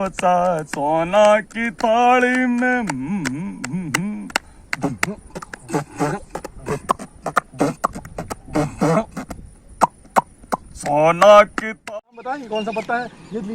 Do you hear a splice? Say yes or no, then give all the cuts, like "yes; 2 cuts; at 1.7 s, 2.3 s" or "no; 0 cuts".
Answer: yes; 1 cut; at 11.8 s